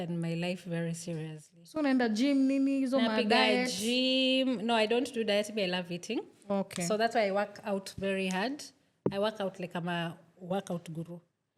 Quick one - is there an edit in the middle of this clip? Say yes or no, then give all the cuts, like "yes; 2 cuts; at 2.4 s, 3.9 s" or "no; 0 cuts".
no; 0 cuts